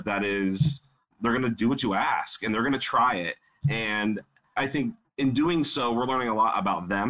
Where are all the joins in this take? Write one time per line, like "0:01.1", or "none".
0:01.1
0:04.7